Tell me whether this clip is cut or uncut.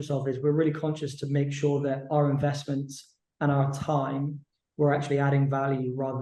uncut